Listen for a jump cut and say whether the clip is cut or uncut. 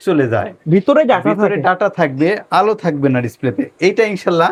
uncut